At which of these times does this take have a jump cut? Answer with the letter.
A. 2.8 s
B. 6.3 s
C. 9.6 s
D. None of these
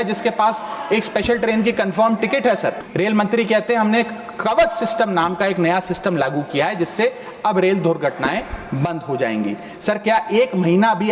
A